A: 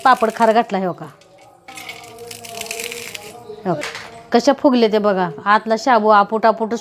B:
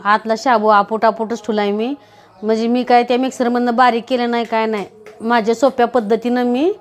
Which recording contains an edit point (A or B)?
A